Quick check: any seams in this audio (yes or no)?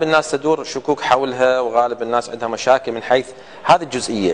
no